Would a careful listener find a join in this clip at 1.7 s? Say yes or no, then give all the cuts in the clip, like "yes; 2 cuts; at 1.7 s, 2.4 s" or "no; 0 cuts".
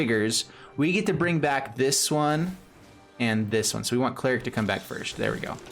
yes; 1 cut; at 1.7 s